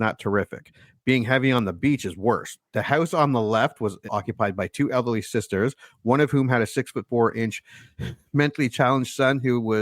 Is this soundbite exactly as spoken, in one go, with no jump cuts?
no; 1 cut; at 4.1 s

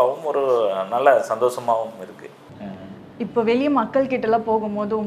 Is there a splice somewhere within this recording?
no; 0 cuts

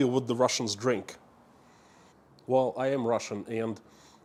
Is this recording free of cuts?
yes; 0 cuts

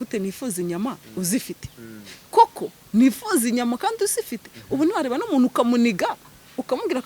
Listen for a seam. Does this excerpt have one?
no; 0 cuts

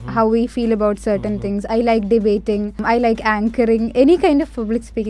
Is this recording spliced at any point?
yes; 1 cut; at 2.8 s

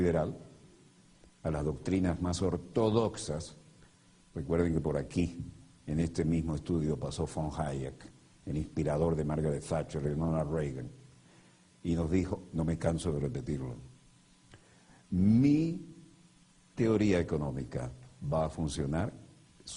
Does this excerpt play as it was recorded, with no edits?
no; 1 cut; at 14.3 s

